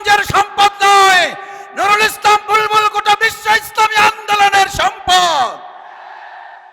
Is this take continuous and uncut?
yes; 0 cuts

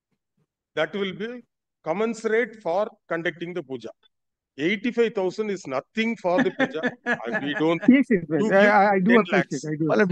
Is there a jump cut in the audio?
no; 0 cuts

